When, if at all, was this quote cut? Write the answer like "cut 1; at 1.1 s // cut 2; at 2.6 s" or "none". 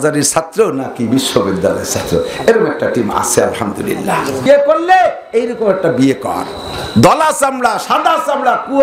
cut 1; at 4.5 s